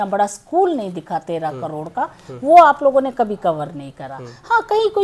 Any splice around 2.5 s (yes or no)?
no